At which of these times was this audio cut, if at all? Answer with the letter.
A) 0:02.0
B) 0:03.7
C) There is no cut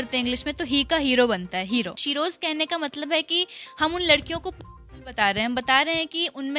A